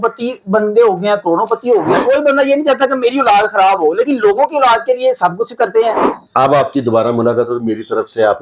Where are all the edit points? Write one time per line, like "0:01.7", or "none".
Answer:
0:02.0
0:06.0